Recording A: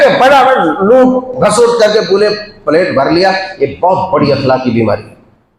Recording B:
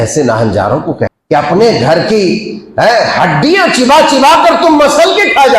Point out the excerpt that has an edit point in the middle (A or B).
B